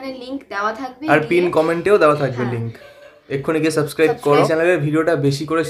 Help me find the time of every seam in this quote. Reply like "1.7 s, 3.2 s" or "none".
4.5 s